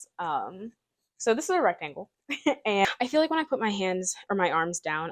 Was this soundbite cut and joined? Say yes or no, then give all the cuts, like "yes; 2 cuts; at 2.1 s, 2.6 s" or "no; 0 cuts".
yes; 1 cut; at 2.8 s